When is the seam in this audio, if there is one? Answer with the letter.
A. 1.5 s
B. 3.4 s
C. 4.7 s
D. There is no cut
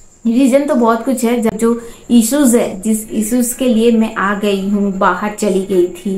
A